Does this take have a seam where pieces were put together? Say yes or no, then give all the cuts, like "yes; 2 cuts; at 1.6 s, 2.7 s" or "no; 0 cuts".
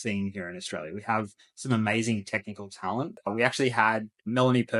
yes; 1 cut; at 3.2 s